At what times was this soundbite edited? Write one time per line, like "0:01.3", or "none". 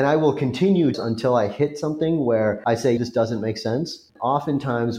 0:01.0
0:02.9
0:04.1